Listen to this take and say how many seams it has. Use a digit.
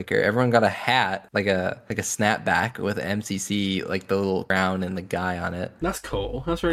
0